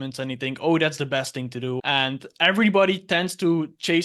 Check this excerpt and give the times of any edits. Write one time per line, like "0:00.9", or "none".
0:01.8